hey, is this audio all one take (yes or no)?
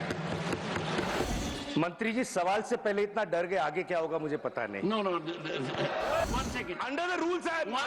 no